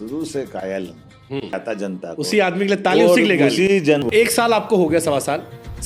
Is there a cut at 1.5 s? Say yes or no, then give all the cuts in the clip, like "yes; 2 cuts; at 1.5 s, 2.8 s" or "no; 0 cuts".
yes; 2 cuts; at 1.5 s, 4.1 s